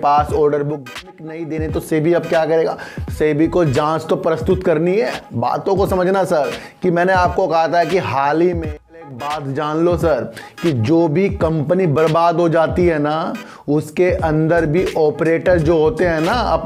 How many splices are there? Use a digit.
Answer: 2